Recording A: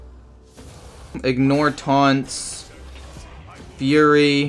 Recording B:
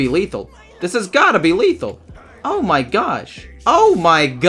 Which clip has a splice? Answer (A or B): A